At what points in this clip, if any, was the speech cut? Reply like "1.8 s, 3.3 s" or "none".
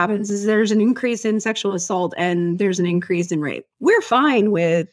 3.6 s